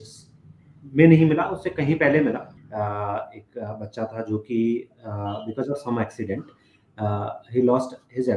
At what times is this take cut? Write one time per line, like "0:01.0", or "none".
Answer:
0:02.5